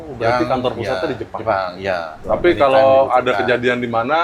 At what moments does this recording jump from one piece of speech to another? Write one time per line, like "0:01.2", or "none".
0:02.1